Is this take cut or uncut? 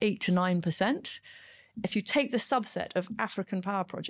cut